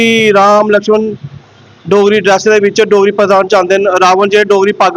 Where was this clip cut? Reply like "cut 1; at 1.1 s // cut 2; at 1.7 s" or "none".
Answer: none